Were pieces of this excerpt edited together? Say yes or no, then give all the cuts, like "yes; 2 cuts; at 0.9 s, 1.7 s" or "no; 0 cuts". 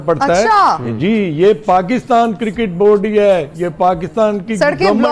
no; 0 cuts